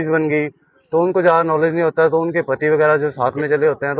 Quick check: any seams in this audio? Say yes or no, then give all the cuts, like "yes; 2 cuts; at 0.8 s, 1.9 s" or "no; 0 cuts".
no; 0 cuts